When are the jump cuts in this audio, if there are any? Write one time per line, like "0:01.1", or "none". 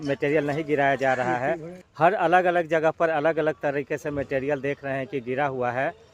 none

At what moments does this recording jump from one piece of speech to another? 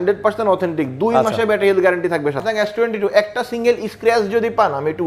0:02.4

